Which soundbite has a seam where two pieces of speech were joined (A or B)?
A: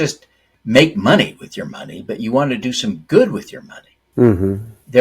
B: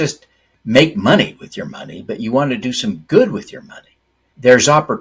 B